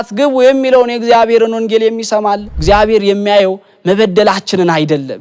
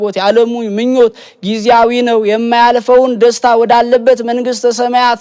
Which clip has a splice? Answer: first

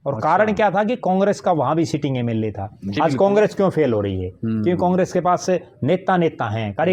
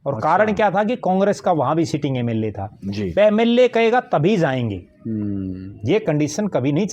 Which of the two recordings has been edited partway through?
first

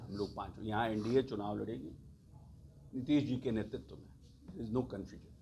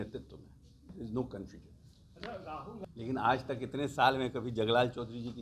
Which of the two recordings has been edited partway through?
second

